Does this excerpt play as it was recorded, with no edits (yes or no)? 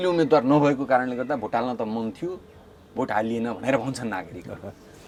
yes